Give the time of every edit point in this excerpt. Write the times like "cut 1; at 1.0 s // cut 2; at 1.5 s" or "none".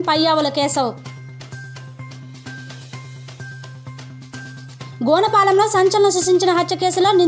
cut 1; at 1.0 s

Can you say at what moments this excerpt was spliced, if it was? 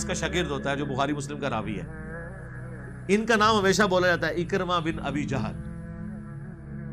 cut 1; at 1.8 s // cut 2; at 3.1 s // cut 3; at 5.4 s

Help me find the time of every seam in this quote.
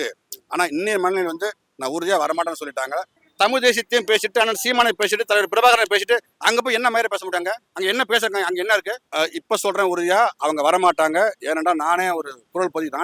cut 1; at 3.2 s // cut 2; at 9.0 s

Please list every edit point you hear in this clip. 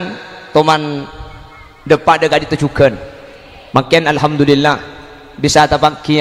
none

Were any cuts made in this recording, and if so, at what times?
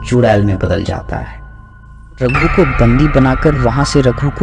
cut 1; at 2.2 s

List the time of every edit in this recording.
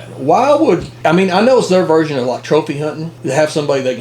cut 1; at 1.0 s // cut 2; at 3.1 s

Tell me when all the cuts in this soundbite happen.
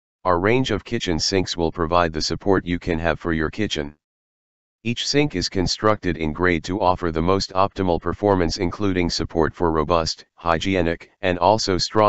none

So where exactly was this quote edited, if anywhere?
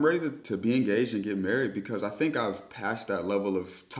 none

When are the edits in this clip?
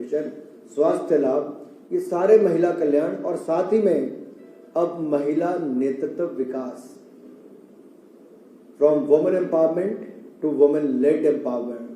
none

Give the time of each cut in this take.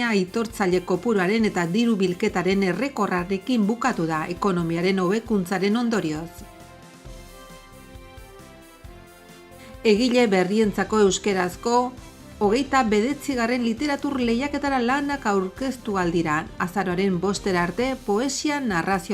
cut 1; at 6.4 s // cut 2; at 8.2 s // cut 3; at 9.8 s

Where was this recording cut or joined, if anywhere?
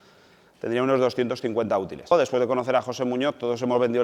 cut 1; at 2.1 s

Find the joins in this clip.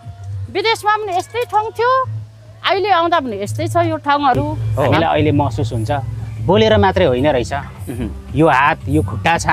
cut 1; at 4.9 s

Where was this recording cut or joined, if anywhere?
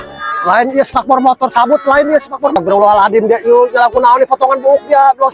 cut 1; at 2.5 s

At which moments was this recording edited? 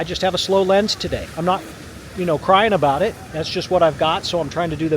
cut 1; at 1.3 s

